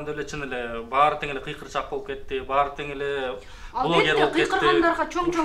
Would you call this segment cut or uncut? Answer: uncut